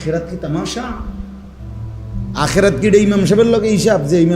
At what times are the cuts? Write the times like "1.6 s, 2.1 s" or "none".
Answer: 1.1 s, 2.4 s